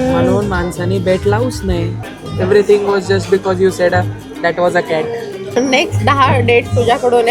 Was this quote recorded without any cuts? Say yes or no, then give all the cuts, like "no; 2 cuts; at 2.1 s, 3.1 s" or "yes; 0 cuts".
no; 2 cuts; at 2.0 s, 5.4 s